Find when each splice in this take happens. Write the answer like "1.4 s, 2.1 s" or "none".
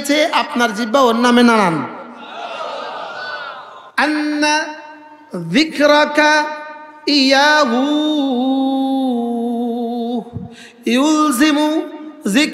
3.8 s

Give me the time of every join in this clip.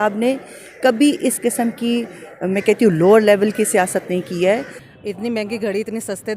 4.7 s

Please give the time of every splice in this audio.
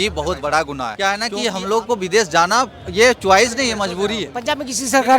0.9 s, 4.3 s

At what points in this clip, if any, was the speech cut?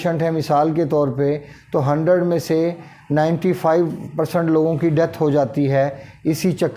none

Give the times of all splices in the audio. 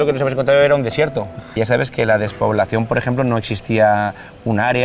1.5 s

